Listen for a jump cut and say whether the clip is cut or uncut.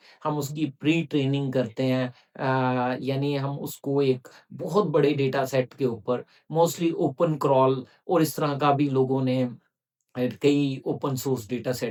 uncut